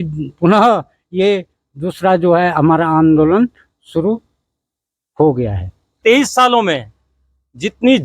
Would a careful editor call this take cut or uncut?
cut